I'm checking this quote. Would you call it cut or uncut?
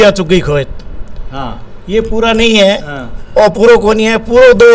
uncut